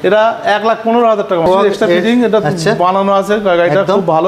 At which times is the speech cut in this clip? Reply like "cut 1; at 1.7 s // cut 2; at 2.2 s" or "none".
cut 1; at 1.5 s

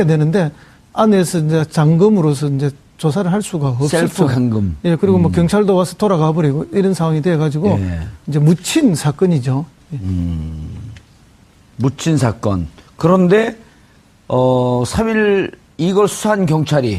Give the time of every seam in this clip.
cut 1; at 12.1 s

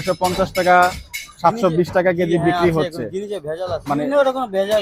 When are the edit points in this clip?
cut 1; at 3.8 s

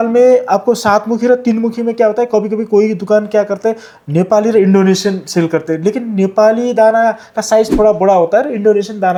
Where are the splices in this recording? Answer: none

